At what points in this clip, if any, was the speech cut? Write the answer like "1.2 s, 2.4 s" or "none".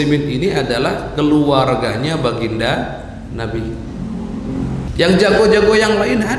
4.9 s